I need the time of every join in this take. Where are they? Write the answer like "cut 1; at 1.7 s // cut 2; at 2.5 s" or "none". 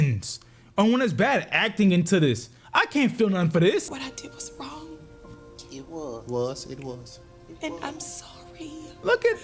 cut 1; at 3.9 s